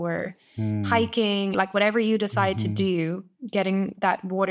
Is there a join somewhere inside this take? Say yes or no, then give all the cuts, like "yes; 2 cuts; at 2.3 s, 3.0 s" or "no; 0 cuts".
yes; 1 cut; at 1.5 s